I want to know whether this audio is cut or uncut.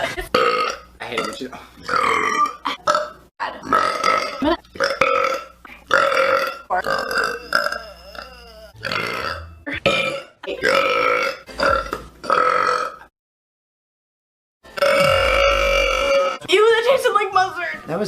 uncut